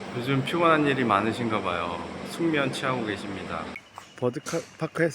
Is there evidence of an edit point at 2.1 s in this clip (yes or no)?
no